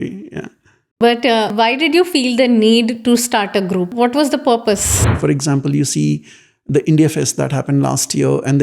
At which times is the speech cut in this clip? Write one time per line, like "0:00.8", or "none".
0:01.5
0:03.9
0:05.0